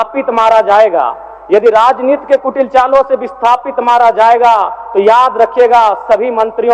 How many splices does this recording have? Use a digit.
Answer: 0